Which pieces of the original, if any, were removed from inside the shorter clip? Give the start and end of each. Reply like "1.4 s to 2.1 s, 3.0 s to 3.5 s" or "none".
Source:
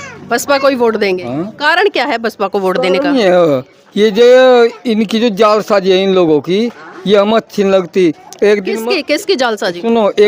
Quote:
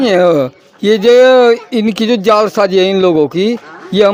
none